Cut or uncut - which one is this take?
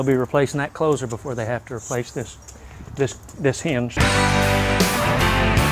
cut